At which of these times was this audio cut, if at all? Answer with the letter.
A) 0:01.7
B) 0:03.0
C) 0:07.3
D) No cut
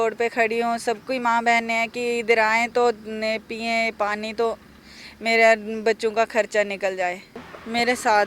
C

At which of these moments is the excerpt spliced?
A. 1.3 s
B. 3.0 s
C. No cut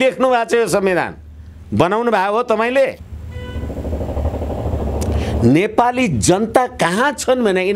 B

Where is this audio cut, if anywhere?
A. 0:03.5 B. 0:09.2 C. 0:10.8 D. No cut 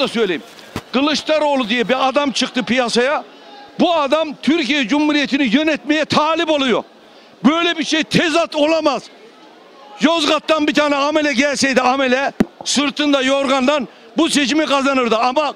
D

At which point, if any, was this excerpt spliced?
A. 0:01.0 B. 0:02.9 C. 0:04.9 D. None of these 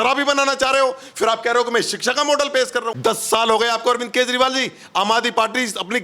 B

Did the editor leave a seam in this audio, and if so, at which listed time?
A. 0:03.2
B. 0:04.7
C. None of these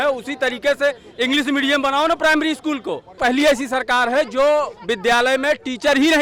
A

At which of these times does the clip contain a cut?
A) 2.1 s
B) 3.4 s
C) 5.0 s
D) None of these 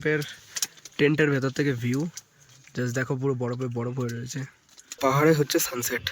C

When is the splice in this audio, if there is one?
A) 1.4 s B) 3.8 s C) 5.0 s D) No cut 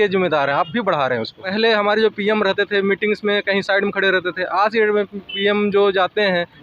A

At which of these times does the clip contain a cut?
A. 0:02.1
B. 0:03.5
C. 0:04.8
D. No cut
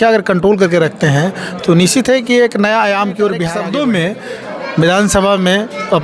B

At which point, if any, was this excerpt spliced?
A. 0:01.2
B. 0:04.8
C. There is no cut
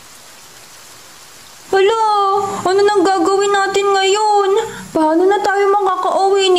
A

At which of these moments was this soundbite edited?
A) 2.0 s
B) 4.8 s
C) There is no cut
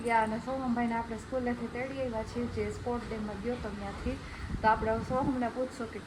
C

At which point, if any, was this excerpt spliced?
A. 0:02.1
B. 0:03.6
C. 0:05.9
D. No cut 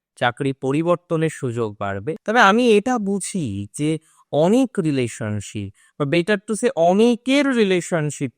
A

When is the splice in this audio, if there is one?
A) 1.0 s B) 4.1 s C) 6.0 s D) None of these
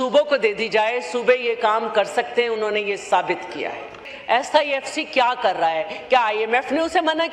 B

